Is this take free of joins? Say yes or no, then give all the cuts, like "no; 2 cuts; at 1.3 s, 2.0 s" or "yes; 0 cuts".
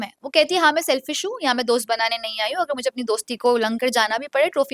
yes; 0 cuts